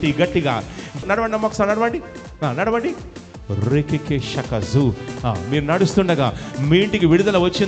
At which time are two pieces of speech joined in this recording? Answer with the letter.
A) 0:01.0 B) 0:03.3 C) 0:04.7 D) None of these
A